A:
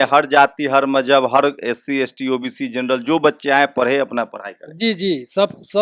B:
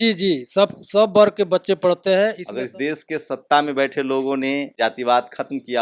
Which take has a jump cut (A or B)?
B